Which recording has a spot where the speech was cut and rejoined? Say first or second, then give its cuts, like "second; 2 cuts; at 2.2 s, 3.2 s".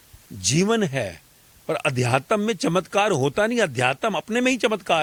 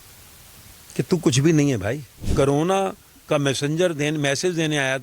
second; 1 cut; at 2.2 s